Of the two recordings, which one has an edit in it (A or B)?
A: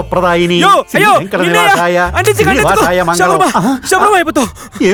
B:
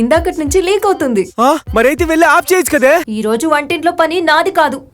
B